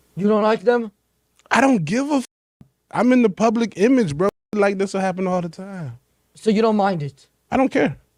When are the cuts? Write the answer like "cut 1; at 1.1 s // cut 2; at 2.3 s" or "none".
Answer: none